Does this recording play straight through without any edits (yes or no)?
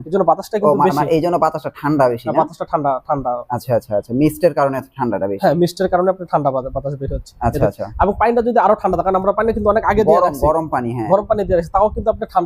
yes